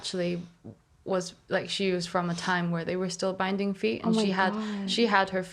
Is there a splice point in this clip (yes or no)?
no